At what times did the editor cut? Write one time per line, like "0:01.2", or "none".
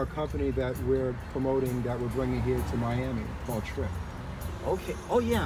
none